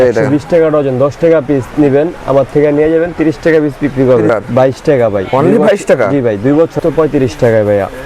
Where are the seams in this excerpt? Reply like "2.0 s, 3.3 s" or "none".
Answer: 4.3 s, 6.7 s